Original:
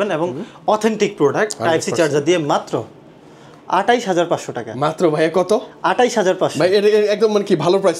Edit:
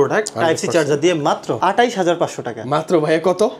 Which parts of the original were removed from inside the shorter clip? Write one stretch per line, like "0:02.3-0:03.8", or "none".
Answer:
0:02.8-0:03.7